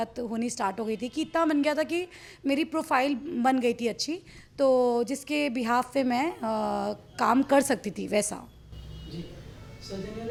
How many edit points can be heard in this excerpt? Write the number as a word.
zero